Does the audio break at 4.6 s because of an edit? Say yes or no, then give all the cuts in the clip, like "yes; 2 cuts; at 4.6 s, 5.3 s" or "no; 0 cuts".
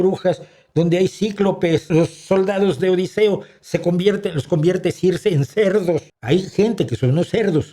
no; 2 cuts; at 1.9 s, 6.1 s